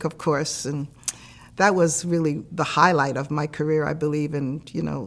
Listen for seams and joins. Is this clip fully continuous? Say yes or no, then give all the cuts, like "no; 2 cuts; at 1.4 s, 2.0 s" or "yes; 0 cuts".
yes; 0 cuts